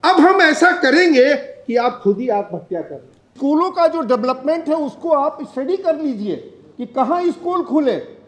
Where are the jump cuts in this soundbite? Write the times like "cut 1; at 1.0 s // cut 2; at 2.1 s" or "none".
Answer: cut 1; at 3.3 s